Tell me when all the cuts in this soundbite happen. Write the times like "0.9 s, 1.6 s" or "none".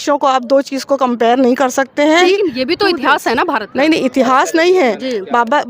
2.2 s